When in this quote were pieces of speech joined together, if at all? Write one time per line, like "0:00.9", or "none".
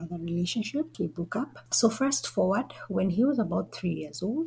0:01.3